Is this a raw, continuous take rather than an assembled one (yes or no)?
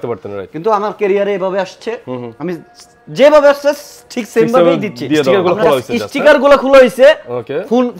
no